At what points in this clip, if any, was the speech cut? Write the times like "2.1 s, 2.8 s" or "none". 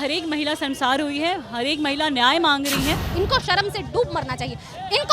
3.1 s